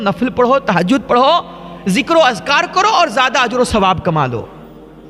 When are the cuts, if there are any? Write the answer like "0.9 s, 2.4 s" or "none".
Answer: none